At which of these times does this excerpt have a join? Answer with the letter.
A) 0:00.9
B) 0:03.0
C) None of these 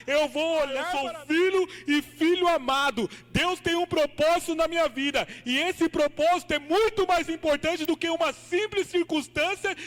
A